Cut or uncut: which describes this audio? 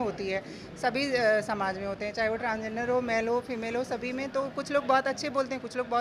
uncut